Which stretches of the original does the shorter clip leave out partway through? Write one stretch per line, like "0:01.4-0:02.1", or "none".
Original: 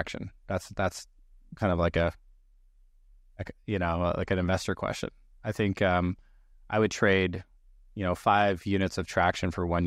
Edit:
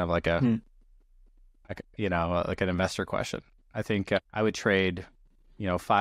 0:05.9-0:06.5